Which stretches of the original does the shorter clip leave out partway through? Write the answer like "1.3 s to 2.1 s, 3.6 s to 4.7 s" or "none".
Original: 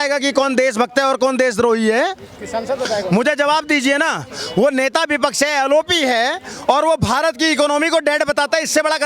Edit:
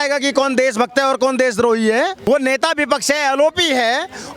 2.2 s to 4.5 s